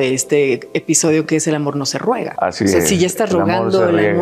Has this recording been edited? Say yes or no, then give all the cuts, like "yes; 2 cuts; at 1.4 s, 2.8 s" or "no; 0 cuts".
yes; 1 cut; at 2.3 s